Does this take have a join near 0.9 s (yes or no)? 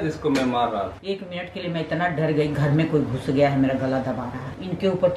yes